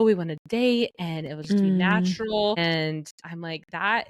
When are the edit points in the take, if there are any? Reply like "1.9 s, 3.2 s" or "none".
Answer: 2.6 s